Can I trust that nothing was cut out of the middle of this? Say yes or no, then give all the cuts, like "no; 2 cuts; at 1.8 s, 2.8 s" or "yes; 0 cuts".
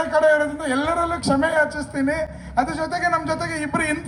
yes; 0 cuts